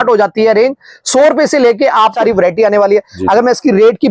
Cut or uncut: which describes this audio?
cut